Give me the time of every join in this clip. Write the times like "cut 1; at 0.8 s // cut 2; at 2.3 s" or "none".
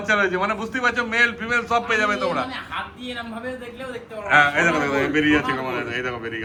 none